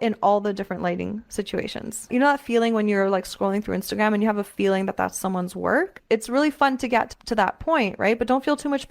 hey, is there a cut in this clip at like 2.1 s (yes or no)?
yes